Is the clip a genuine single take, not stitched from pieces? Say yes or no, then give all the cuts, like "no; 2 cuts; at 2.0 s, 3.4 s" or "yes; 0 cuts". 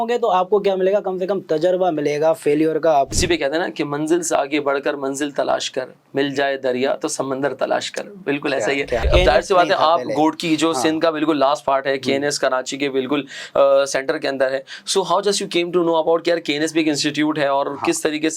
no; 2 cuts; at 3.1 s, 9.1 s